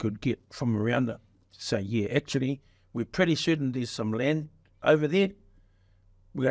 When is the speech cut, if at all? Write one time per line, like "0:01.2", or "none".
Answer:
none

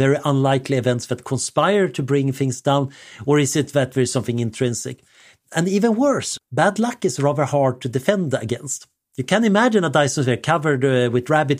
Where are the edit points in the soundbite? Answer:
0:06.4

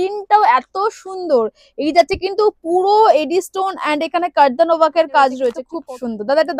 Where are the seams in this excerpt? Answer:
0:05.7

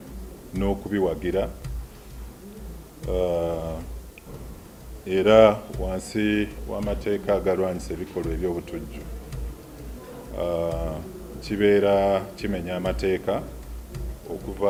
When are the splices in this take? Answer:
none

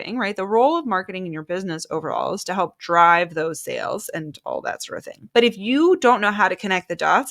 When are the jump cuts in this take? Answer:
0:05.2

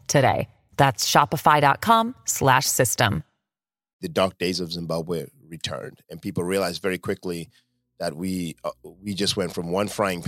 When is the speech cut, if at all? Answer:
0:04.0

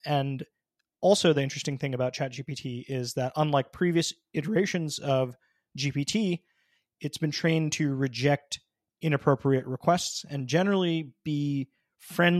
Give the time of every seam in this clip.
none

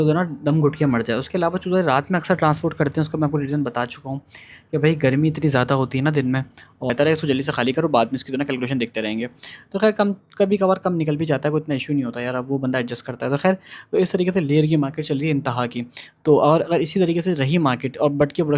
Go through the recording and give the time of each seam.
0:06.9

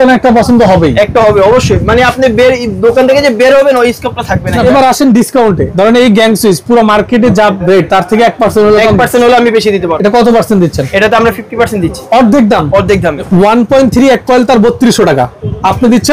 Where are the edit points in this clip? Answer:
0:04.6
0:05.7
0:09.9
0:13.3

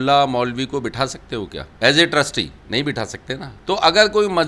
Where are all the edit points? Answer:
0:01.6
0:02.6
0:03.5

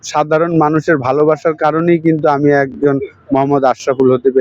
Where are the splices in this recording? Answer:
none

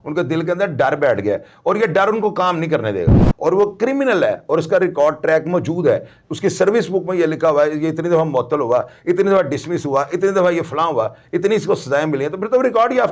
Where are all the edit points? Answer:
0:03.3

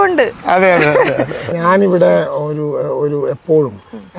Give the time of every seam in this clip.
0:01.4

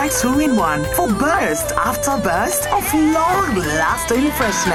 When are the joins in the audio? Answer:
none

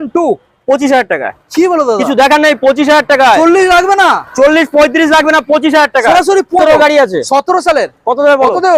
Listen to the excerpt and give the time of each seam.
0:06.6

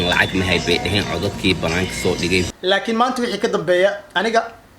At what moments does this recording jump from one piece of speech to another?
0:02.5

